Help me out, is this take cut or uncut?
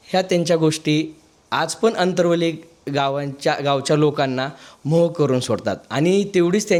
uncut